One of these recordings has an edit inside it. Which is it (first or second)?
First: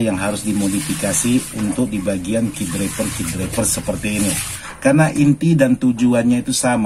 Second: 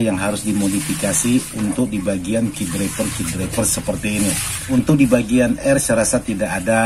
first